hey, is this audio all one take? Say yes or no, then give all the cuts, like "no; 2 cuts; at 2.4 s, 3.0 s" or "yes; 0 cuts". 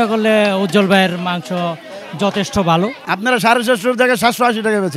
no; 1 cut; at 3.1 s